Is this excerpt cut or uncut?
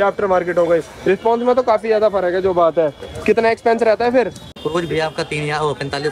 cut